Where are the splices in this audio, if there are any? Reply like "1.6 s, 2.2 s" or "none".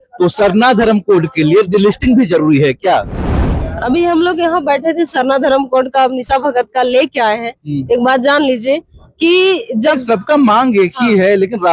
3.7 s